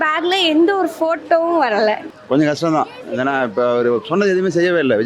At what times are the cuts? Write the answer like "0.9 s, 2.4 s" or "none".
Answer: 2.1 s